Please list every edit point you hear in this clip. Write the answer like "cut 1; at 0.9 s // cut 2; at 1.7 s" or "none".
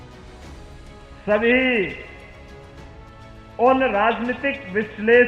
cut 1; at 2.1 s // cut 2; at 3.6 s